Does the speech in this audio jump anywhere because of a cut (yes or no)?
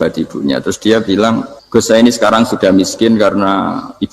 yes